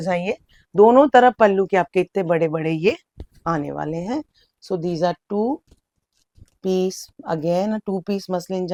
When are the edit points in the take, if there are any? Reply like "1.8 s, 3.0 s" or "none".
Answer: none